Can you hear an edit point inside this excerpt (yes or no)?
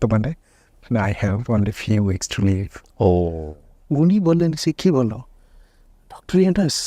yes